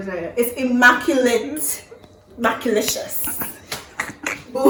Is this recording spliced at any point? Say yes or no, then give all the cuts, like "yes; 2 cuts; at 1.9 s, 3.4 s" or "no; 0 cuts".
no; 0 cuts